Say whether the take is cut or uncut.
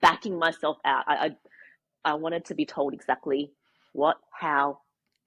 uncut